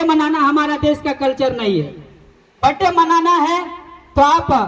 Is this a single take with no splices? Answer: yes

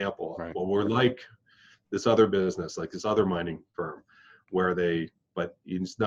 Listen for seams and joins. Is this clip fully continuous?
yes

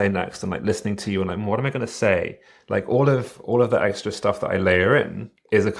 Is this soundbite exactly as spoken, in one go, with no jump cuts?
yes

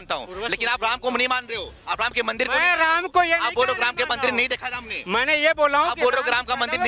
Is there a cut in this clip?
no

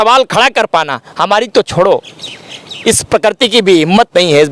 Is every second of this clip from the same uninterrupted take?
yes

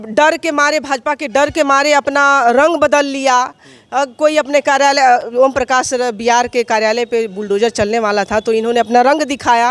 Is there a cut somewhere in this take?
no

